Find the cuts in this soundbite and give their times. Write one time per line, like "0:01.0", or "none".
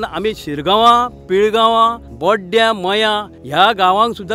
0:02.1
0:03.3